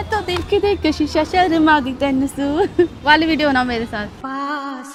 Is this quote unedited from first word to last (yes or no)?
yes